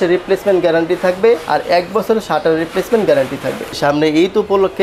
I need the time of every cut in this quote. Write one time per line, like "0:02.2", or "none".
0:03.7